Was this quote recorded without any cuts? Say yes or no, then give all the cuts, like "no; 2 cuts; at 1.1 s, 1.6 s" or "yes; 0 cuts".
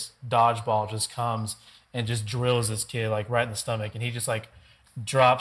yes; 0 cuts